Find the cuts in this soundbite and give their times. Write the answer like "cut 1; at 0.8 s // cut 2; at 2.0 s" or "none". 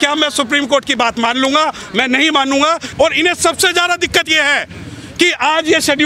cut 1; at 2.8 s